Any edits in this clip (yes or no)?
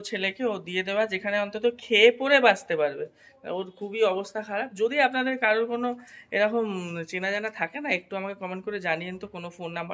no